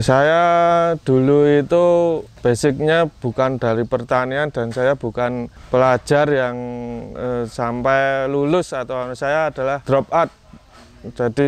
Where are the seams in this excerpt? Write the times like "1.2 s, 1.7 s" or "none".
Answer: 2.3 s, 5.5 s, 9.8 s